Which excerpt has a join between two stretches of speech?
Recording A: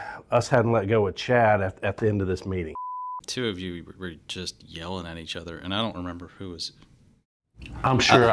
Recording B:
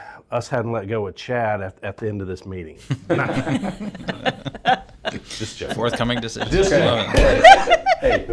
A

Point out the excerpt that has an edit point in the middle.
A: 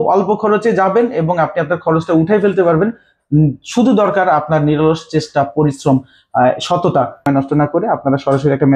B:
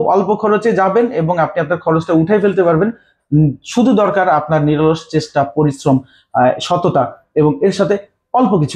A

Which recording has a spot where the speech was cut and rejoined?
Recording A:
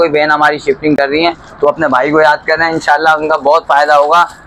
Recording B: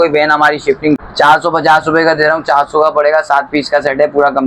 B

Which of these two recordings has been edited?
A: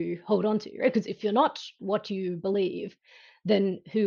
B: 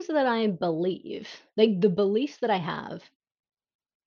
A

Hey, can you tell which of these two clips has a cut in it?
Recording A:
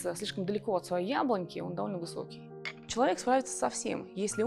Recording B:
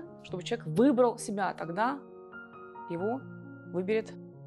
A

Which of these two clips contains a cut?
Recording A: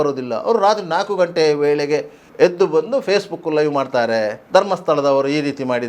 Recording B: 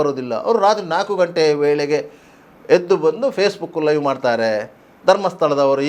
A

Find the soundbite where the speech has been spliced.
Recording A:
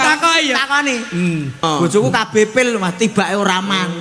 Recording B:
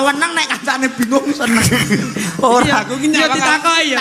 A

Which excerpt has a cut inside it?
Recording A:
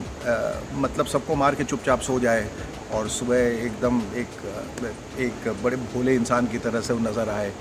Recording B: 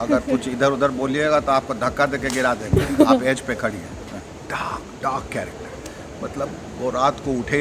B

